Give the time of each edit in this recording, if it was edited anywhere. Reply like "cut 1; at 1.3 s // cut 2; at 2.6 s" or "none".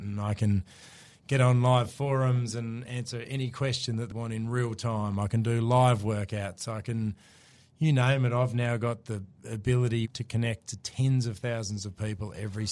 cut 1; at 4.1 s // cut 2; at 10.1 s